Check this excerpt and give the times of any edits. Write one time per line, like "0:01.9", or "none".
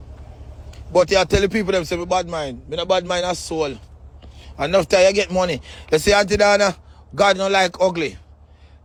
none